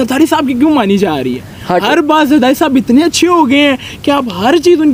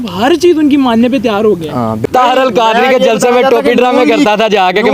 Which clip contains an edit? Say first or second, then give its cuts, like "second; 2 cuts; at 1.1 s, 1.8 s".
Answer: second; 1 cut; at 2.0 s